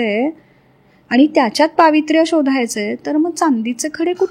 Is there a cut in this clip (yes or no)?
no